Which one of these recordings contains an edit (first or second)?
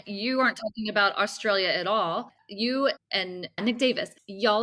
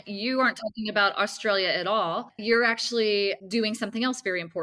first